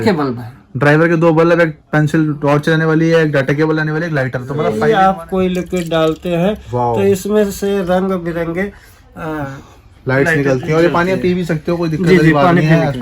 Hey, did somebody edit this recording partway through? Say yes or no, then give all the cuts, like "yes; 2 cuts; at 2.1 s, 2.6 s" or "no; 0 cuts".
yes; 1 cut; at 4.7 s